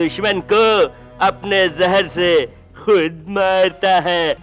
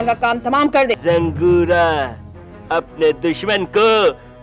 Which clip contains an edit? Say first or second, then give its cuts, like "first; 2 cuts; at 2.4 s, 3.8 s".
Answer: second; 1 cut; at 1.0 s